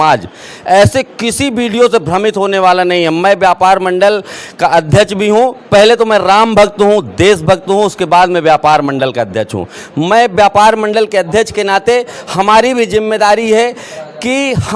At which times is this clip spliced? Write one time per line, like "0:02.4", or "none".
none